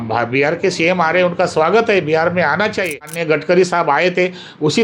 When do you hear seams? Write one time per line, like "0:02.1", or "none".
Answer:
0:03.1